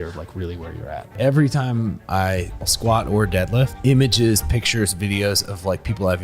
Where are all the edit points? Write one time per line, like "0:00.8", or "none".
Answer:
0:01.1
0:02.7
0:03.7